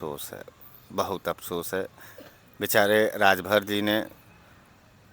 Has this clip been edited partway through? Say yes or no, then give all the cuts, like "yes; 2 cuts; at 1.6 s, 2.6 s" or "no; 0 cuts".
no; 0 cuts